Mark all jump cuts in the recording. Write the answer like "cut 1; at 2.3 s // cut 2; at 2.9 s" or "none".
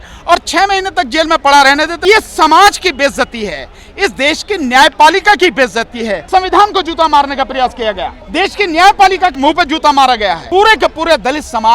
cut 1; at 2.0 s // cut 2; at 6.2 s // cut 3; at 8.1 s // cut 4; at 9.4 s // cut 5; at 10.4 s